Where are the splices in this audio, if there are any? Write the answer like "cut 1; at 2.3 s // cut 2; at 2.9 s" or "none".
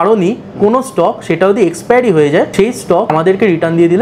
cut 1; at 3.1 s

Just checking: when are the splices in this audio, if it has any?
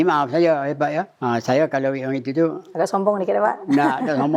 cut 1; at 1.1 s // cut 2; at 2.6 s

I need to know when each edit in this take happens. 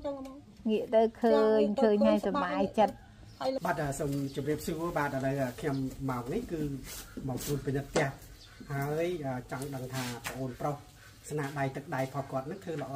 cut 1; at 3.6 s

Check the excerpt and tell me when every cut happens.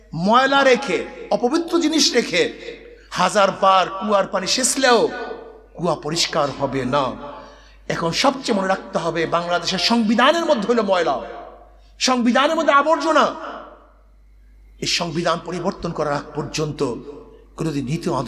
none

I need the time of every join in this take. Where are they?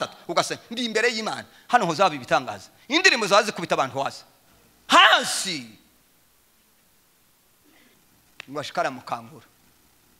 cut 1; at 7.9 s

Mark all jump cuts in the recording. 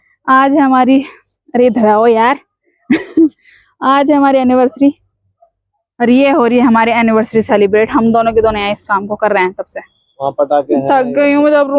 none

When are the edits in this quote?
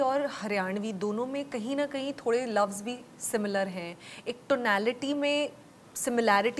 none

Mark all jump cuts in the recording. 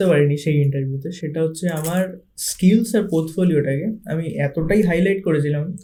none

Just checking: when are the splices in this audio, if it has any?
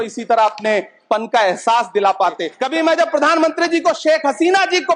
cut 1; at 2.5 s

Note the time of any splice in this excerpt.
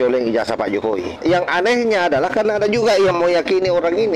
cut 1; at 1.1 s

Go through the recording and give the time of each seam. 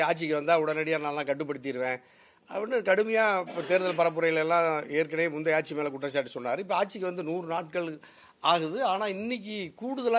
none

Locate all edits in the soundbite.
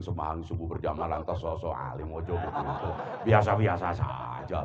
none

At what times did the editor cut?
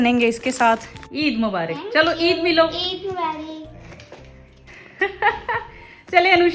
cut 1; at 1.0 s

